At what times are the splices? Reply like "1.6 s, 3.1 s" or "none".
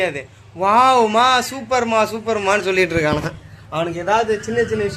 none

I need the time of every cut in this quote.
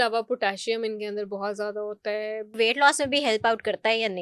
2.6 s

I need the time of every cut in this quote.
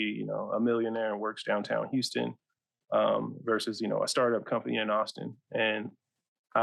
none

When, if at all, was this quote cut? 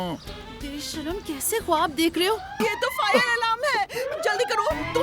2.6 s

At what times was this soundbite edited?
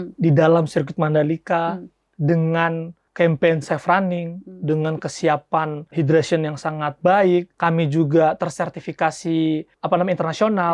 3.0 s, 5.8 s, 7.5 s, 9.7 s

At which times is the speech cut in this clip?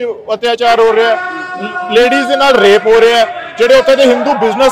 none

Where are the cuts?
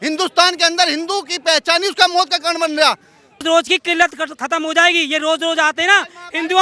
3.4 s

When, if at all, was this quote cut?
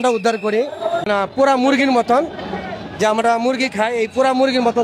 1.1 s

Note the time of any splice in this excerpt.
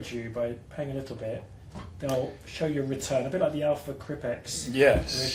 none

